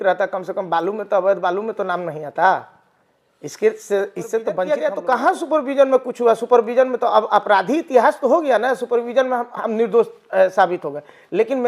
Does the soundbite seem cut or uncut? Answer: cut